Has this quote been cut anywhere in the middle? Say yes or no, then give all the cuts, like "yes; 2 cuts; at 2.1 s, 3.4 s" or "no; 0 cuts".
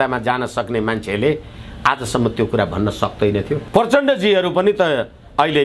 yes; 1 cut; at 3.6 s